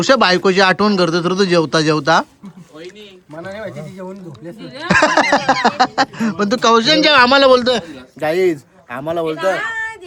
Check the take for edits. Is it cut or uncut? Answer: uncut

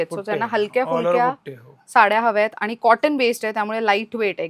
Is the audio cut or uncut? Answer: uncut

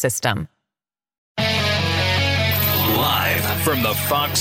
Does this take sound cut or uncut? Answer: cut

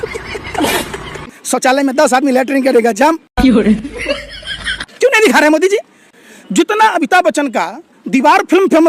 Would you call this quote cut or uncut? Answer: uncut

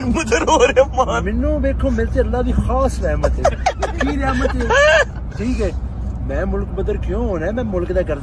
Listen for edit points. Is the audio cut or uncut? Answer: uncut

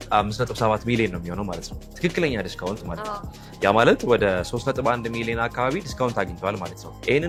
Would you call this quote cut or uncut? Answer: uncut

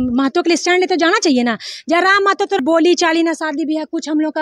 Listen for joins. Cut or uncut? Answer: cut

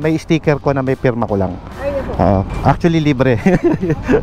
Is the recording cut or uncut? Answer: uncut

